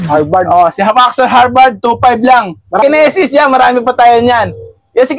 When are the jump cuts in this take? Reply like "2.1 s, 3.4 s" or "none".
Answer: 2.8 s